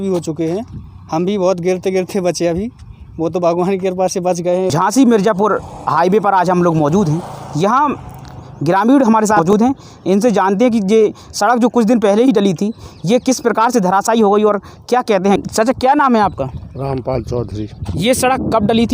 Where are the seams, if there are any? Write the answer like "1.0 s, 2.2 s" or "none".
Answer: 4.7 s, 9.4 s, 15.4 s